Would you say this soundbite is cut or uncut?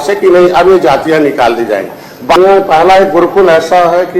cut